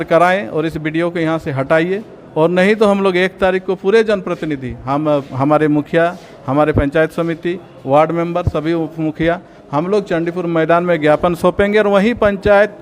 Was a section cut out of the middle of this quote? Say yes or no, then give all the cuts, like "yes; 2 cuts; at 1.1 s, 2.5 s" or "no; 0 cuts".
no; 0 cuts